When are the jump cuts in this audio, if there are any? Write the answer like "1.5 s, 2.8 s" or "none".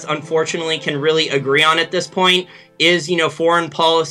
none